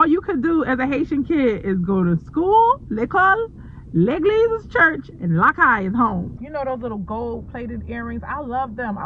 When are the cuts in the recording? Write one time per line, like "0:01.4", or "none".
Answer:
0:06.3